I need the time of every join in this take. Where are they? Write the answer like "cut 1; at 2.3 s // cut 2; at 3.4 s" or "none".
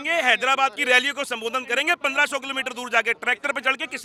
none